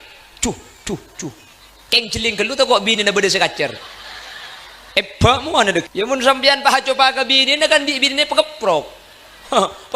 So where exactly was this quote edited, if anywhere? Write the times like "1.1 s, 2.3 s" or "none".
5.9 s